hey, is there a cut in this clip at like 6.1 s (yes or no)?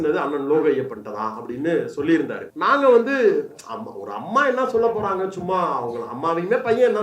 no